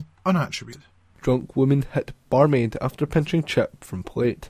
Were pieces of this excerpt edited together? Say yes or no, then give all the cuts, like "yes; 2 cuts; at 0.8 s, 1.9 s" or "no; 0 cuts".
yes; 1 cut; at 1.1 s